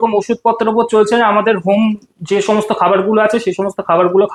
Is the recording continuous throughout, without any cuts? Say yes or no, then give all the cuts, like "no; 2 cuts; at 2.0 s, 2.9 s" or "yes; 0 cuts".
yes; 0 cuts